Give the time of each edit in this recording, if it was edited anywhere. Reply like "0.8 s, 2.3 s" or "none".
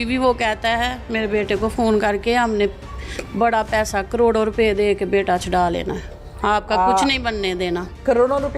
none